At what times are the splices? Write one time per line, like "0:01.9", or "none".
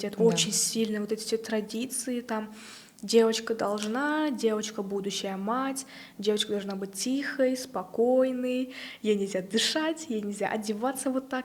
none